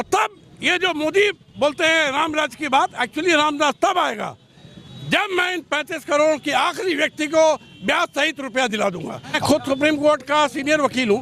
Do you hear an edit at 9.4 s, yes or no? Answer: yes